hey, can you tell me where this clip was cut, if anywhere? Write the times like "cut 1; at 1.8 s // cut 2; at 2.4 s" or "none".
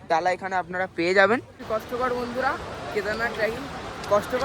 cut 1; at 1.6 s

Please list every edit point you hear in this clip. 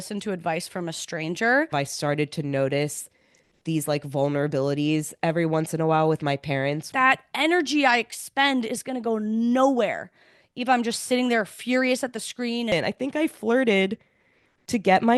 cut 1; at 1.7 s // cut 2; at 6.8 s // cut 3; at 12.7 s

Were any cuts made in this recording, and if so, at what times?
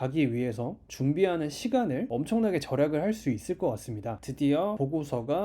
cut 1; at 2.1 s

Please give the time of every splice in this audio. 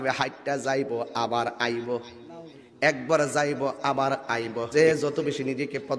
cut 1; at 4.7 s

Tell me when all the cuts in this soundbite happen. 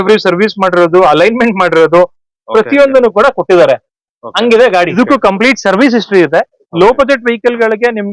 cut 1; at 4.9 s

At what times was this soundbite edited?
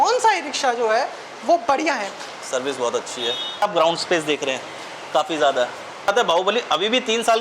cut 1; at 2.2 s // cut 2; at 3.6 s // cut 3; at 6.1 s

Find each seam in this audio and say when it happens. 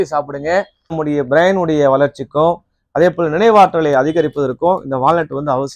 cut 1; at 1.0 s

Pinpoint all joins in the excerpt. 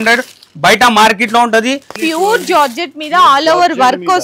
cut 1; at 2.0 s

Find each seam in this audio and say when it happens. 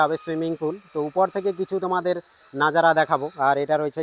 none

